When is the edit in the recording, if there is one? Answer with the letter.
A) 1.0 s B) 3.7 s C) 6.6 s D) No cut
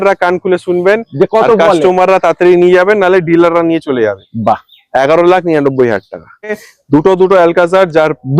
C